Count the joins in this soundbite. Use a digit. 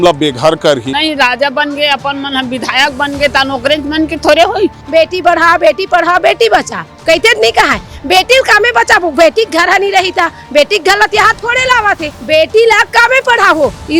3